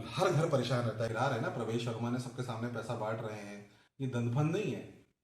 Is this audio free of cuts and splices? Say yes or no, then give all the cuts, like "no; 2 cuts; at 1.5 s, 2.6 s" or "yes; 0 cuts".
no; 1 cut; at 1.1 s